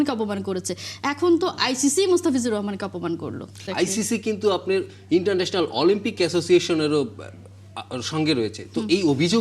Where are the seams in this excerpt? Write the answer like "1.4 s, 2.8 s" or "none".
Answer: 3.6 s